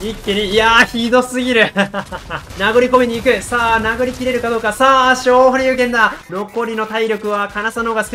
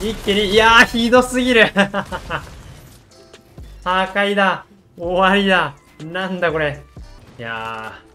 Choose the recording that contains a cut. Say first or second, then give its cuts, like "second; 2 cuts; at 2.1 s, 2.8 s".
first; 2 cuts; at 2.5 s, 6.2 s